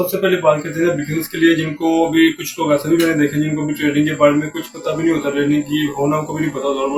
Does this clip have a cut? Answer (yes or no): no